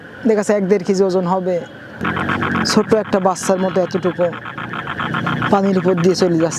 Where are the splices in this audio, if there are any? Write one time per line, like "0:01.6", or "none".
0:02.0